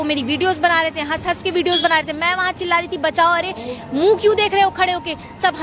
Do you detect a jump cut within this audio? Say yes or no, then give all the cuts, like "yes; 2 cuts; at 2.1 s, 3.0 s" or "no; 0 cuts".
no; 0 cuts